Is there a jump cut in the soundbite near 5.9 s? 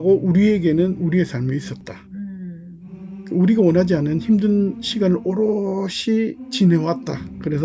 no; 0 cuts

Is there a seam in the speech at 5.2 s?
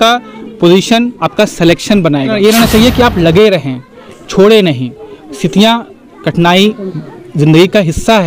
no; 1 cut; at 2.3 s

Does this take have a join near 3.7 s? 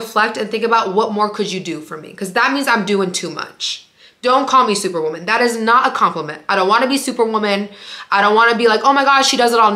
no; 0 cuts

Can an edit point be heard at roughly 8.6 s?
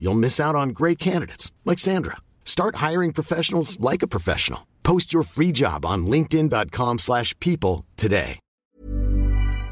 yes; 1 cut; at 8.6 s

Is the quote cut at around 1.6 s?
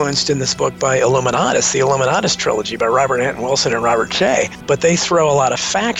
no; 1 cut; at 4.6 s

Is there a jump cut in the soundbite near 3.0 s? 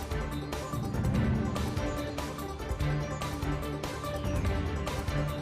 no; 0 cuts

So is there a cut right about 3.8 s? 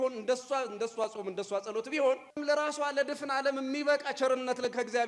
no; 1 cut; at 2.3 s

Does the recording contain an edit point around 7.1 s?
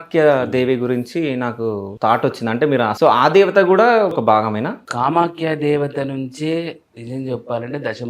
no; 3 cuts; at 1.9 s, 2.9 s, 4.4 s

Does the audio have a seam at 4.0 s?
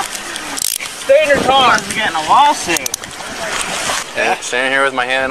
yes; 1 cut; at 4.0 s

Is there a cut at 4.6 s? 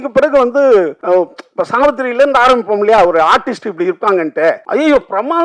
yes; 2 cuts; at 1.0 s, 4.6 s

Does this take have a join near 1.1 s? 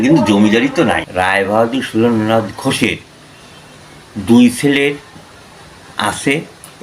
yes; 1 cut; at 1.1 s

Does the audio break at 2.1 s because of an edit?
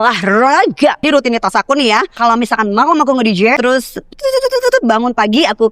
yes; 3 cuts; at 1.0 s, 2.1 s, 3.6 s

